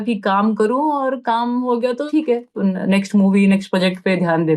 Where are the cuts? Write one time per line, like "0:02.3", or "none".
0:02.1